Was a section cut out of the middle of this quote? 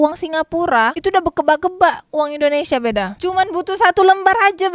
no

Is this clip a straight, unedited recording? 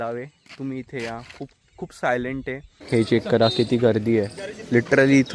no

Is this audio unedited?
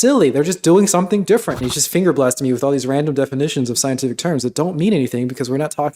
no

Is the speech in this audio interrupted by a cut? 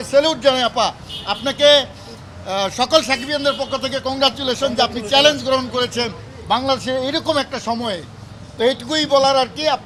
no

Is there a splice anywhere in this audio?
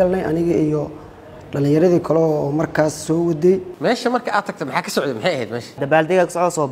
yes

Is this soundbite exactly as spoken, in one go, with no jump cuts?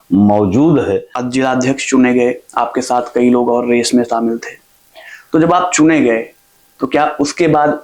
no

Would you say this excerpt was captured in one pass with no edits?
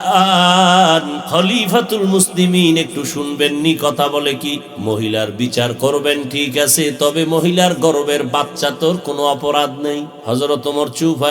no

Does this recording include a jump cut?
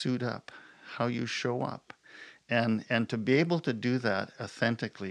no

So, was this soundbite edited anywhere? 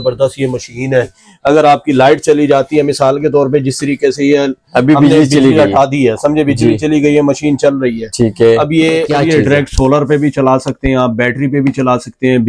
yes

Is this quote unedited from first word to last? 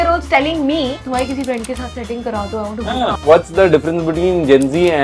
no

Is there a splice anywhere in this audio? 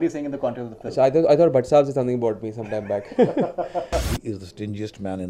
yes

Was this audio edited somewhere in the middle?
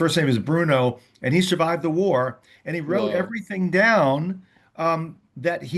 no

